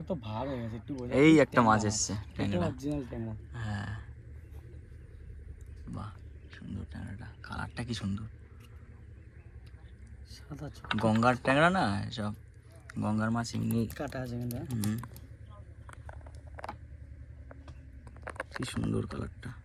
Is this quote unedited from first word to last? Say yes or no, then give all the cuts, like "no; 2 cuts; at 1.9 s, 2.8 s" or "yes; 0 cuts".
yes; 0 cuts